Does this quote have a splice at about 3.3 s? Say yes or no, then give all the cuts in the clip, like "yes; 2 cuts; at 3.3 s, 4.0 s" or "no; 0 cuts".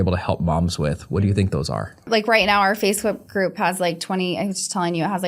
no; 1 cut; at 2.1 s